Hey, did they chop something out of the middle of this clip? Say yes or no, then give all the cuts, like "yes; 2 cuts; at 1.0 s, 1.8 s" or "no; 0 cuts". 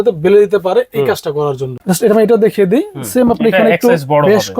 yes; 1 cut; at 1.7 s